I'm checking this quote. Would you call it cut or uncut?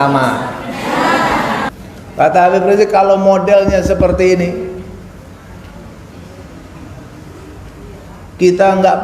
cut